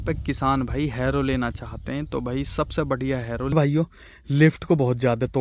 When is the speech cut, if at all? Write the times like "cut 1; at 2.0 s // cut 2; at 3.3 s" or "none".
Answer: cut 1; at 3.5 s